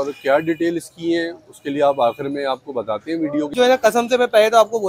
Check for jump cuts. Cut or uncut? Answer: cut